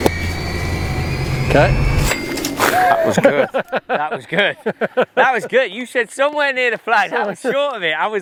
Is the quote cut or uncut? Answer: uncut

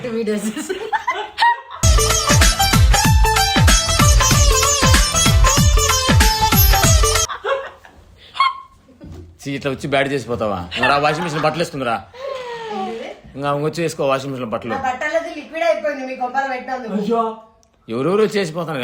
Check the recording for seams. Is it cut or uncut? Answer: uncut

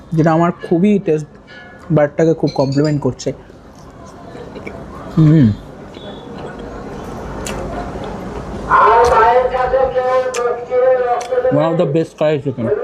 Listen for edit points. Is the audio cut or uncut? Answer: uncut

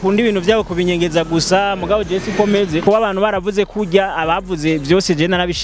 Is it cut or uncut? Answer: cut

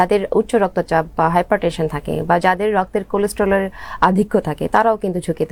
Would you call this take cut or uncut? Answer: uncut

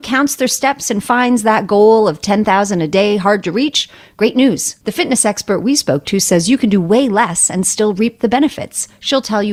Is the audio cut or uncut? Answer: uncut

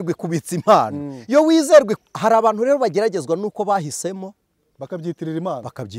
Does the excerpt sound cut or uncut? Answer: cut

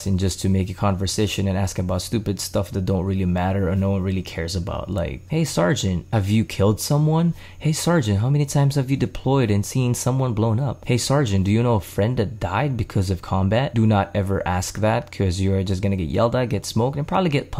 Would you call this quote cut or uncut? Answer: cut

